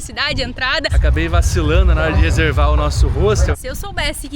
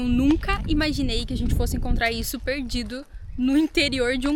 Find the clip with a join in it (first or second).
first